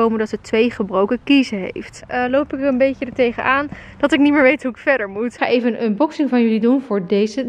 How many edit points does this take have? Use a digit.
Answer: 2